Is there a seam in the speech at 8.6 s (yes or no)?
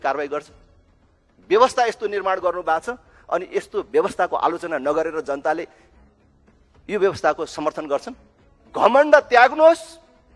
yes